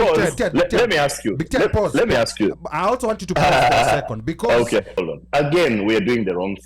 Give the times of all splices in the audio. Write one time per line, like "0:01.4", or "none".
0:05.0